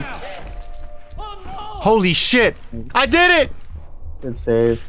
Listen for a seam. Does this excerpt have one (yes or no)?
no